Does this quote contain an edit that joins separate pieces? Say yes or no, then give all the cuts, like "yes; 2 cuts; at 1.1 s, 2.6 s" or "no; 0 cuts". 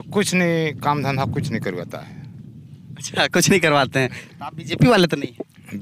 yes; 1 cut; at 4.3 s